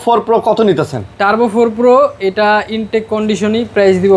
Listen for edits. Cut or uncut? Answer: uncut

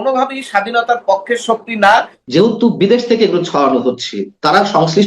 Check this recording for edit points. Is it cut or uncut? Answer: cut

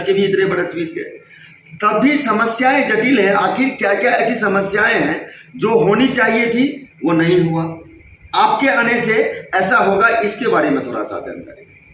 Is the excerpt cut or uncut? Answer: uncut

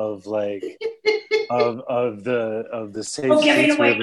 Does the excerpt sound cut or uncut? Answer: uncut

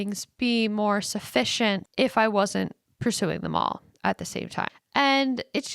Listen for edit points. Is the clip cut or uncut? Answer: cut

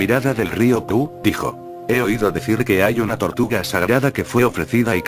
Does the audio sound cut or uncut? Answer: cut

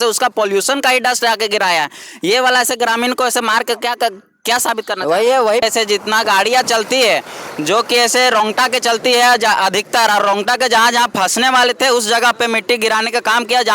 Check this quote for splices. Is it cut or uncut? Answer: cut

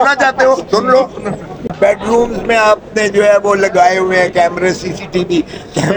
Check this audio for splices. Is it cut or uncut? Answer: cut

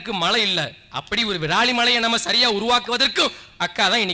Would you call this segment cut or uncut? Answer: uncut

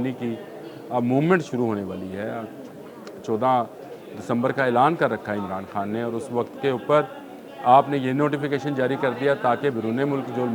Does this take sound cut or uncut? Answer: uncut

